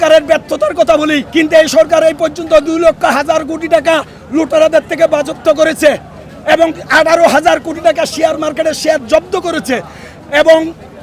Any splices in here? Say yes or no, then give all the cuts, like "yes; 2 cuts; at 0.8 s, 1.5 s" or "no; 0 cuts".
yes; 1 cut; at 1.2 s